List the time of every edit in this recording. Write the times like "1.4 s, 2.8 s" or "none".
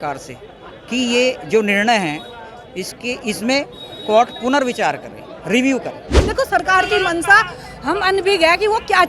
6.1 s